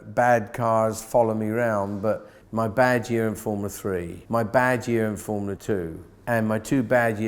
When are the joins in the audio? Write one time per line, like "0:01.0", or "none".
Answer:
0:02.3
0:04.1
0:05.7